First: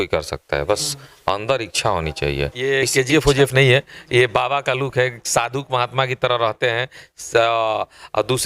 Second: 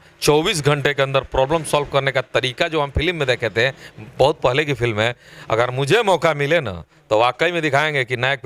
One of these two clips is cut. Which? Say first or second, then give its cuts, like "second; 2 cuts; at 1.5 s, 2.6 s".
first; 1 cut; at 2.6 s